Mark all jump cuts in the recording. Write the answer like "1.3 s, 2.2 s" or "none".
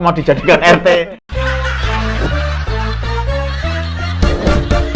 1.1 s